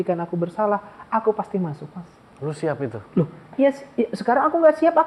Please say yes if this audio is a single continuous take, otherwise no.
yes